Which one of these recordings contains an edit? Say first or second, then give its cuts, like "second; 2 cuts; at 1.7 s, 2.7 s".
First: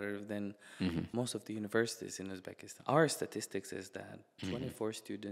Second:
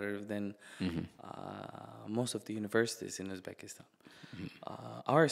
first; 2 cuts; at 1.1 s, 2.7 s